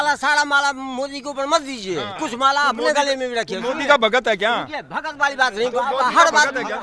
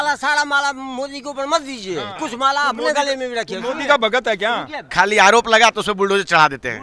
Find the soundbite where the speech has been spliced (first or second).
second